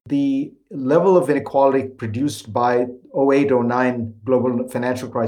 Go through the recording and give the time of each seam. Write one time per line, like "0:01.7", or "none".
0:01.4